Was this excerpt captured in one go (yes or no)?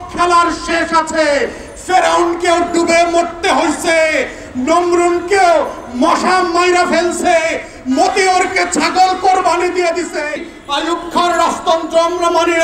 no